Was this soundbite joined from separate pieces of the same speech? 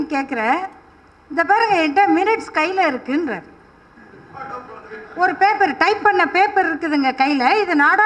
no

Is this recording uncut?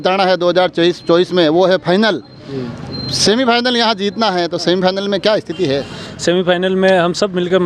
yes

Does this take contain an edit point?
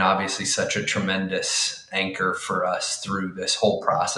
no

